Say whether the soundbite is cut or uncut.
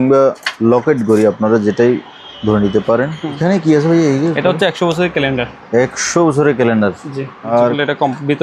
cut